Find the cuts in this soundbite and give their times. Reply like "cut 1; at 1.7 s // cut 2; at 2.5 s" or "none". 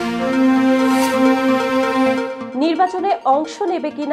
none